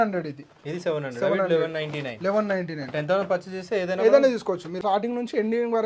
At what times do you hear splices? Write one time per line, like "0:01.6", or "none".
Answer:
0:04.8

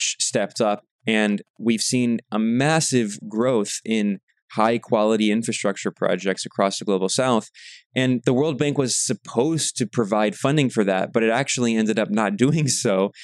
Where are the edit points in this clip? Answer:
0:00.9

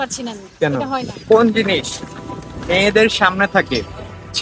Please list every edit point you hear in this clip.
0:01.3

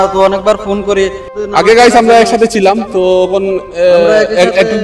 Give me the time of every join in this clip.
0:01.3

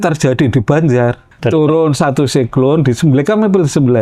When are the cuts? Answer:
0:01.3

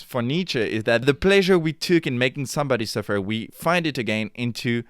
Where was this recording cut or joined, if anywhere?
0:01.0

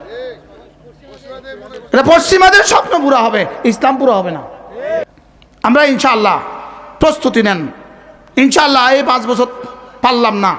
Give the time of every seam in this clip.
0:05.0

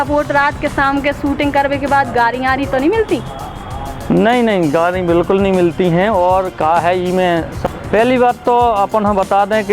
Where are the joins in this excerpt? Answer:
0:07.6

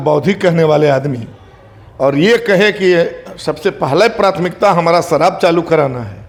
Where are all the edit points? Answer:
none

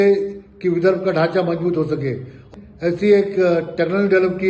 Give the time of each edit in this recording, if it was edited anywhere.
0:02.5

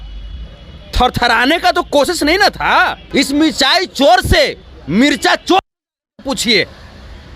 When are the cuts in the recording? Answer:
0:03.0

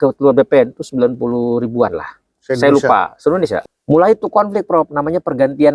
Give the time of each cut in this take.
0:03.6

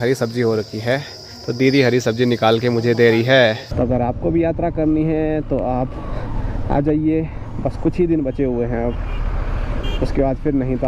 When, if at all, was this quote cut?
0:03.7

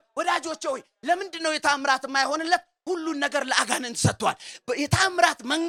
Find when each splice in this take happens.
none

